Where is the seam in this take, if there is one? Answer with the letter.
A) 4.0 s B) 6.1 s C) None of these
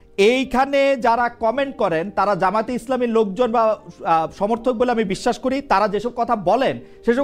C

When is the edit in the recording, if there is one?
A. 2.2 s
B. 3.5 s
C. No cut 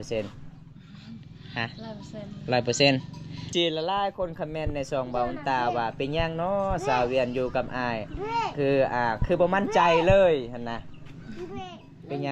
B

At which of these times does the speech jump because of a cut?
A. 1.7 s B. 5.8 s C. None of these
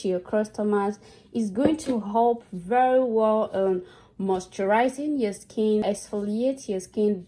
B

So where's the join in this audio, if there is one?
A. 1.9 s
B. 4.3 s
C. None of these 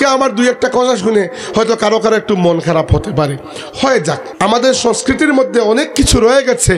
B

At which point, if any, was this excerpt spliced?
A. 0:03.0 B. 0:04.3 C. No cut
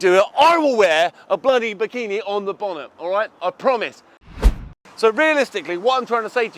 B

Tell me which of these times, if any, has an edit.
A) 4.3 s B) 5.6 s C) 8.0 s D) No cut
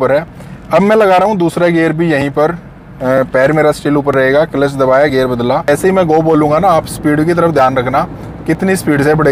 B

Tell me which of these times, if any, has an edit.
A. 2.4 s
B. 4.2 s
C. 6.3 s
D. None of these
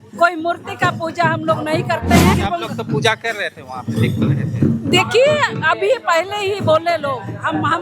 A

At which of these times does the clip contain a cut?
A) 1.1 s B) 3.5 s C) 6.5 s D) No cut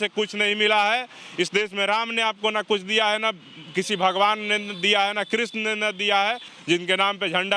C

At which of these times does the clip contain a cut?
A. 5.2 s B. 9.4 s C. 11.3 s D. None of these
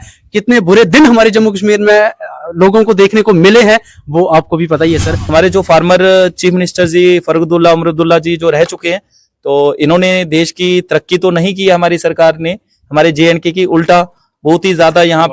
A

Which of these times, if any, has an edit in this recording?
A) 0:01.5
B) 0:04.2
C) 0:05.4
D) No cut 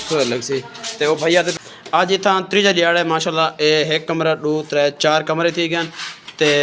A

